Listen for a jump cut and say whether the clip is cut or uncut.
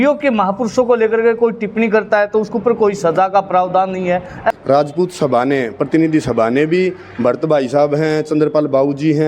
cut